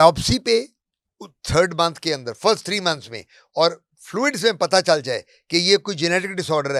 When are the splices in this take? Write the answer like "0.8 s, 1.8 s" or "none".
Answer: none